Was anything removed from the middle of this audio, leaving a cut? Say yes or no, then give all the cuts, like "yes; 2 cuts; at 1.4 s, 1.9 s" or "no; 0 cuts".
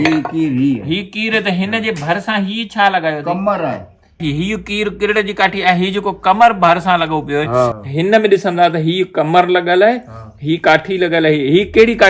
yes; 2 cuts; at 4.2 s, 7.8 s